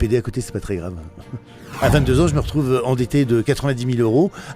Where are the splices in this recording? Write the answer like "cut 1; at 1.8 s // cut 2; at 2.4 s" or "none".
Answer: cut 1; at 1.7 s

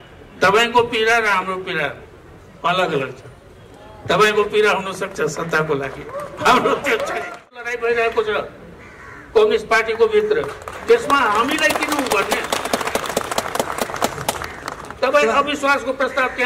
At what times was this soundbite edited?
cut 1; at 7.6 s

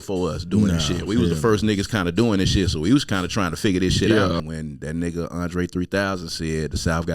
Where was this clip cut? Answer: cut 1; at 4.4 s

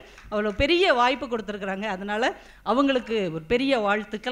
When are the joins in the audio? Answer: none

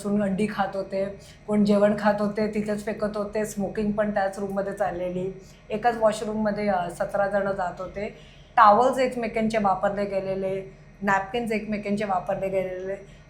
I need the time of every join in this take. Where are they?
none

